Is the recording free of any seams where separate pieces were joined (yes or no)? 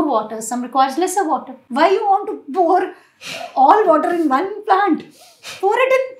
no